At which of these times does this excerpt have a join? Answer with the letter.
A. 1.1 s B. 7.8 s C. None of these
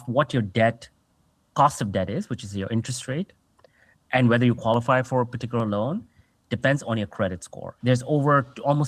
B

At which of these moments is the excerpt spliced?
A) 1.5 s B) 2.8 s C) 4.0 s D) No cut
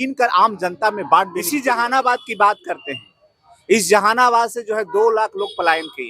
A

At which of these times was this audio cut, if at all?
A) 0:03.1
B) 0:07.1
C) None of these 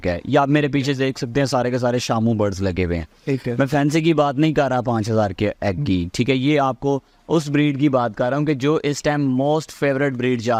C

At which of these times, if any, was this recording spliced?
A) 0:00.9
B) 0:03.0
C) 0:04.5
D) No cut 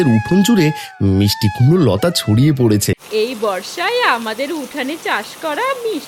B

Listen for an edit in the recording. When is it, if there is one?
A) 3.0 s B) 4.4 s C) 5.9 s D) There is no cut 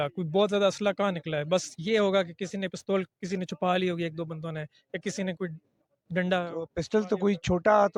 D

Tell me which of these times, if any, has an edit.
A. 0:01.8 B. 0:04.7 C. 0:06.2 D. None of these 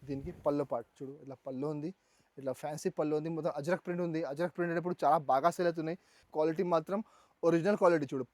C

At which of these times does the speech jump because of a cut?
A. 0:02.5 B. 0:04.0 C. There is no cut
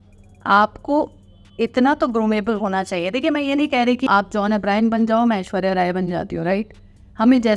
B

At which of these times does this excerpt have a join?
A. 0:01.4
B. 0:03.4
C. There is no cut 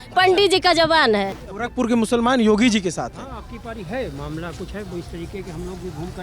A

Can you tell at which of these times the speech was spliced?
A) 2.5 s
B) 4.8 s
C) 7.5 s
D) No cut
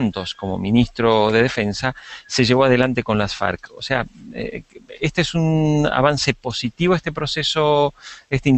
A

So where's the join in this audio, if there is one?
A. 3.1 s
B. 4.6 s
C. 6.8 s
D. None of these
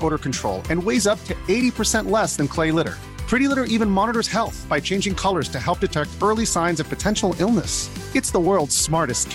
D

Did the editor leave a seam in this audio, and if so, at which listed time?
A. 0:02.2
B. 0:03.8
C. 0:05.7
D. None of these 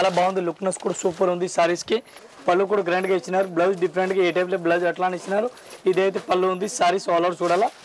A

